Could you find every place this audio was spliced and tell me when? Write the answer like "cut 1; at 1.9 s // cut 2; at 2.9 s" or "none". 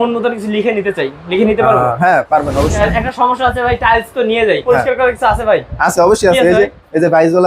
cut 1; at 2.7 s // cut 2; at 4.6 s

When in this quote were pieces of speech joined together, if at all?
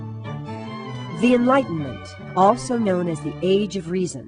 none

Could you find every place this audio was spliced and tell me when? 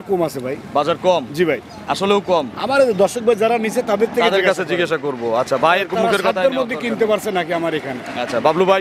none

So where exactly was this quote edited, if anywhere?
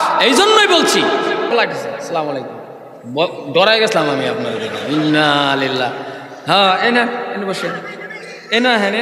cut 1; at 1.5 s

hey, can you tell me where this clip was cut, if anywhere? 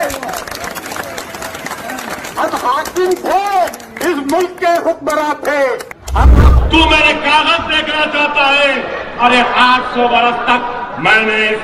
cut 1; at 6.4 s

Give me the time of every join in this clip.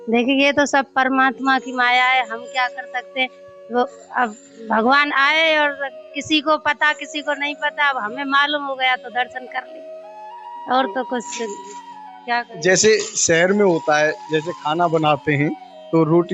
none

